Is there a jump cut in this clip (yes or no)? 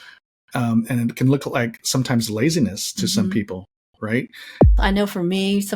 yes